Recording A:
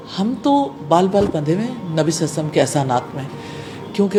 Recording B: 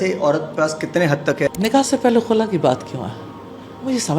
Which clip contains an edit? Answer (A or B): B